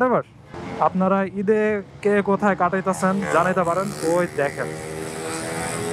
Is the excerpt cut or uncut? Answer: uncut